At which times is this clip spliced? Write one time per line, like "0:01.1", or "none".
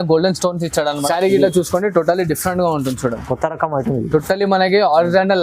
0:01.0